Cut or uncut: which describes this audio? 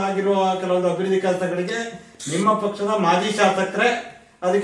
uncut